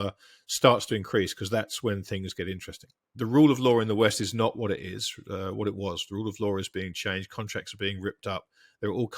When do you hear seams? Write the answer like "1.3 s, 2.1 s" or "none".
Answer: 2.9 s